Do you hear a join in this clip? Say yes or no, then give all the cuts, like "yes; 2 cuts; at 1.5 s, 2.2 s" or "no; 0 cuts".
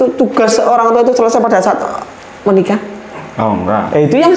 no; 0 cuts